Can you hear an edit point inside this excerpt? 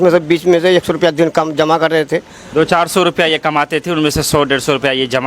no; 0 cuts

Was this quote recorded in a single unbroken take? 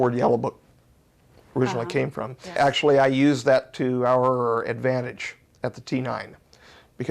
no; 1 cut; at 2.6 s

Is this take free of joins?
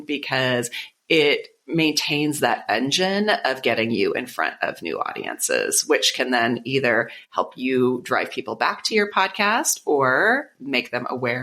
yes; 0 cuts

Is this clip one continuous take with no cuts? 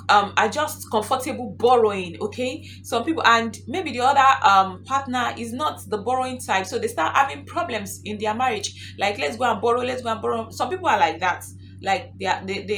yes; 0 cuts

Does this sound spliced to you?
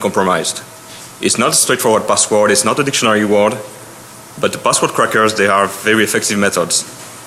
yes; 1 cut; at 4.6 s

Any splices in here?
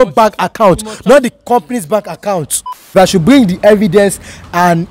yes; 1 cut; at 2.6 s

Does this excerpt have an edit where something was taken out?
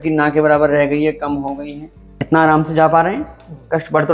yes; 1 cut; at 1.8 s

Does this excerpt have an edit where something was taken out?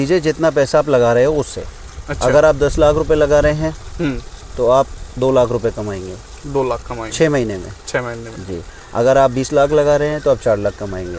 no; 0 cuts

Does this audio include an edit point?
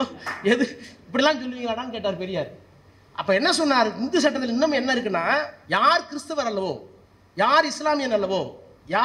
no; 0 cuts

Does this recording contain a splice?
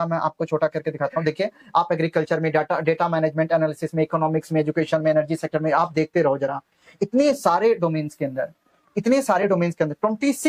no; 0 cuts

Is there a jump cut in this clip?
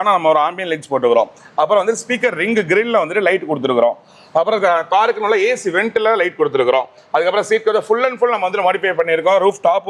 no; 0 cuts

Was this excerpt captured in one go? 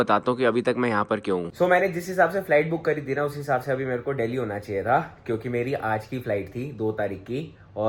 yes; 0 cuts

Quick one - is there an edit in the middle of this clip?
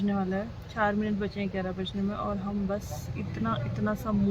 no; 0 cuts

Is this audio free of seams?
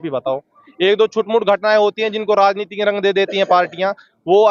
yes; 0 cuts

